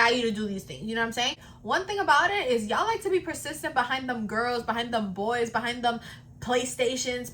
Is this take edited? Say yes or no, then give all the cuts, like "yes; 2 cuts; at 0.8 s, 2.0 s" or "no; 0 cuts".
yes; 1 cut; at 1.5 s